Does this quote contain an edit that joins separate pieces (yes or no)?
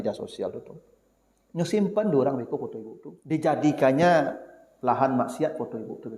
yes